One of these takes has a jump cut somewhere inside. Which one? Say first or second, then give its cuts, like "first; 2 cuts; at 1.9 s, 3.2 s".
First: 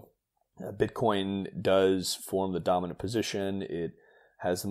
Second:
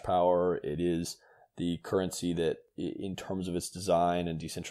second; 1 cut; at 2.7 s